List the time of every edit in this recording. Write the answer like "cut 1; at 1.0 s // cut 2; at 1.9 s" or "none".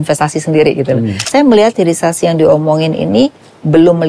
cut 1; at 1.2 s